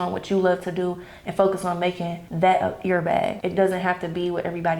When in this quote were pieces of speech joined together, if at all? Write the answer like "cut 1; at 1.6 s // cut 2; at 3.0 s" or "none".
cut 1; at 2.2 s // cut 2; at 3.4 s